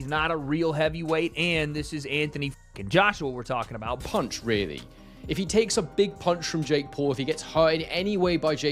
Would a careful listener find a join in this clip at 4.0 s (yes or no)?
yes